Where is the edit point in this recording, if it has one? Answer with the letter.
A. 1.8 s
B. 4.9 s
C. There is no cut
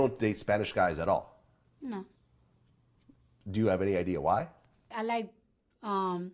B